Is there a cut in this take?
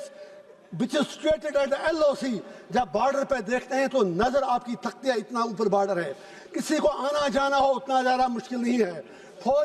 no; 0 cuts

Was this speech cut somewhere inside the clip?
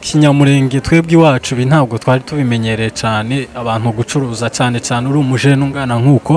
no; 0 cuts

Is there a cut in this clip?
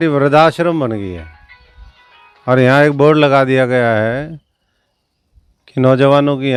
no; 0 cuts

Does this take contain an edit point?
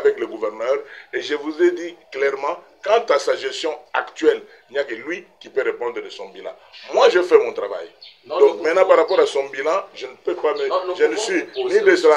no; 0 cuts

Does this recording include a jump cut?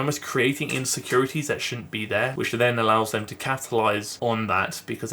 yes; 1 cut; at 2.3 s

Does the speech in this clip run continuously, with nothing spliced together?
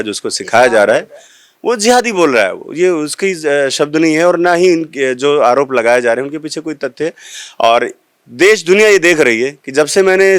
yes; 0 cuts

